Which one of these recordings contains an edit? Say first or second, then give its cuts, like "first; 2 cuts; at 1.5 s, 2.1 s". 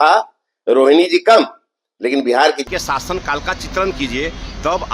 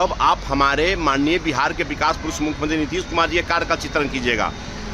first; 1 cut; at 2.6 s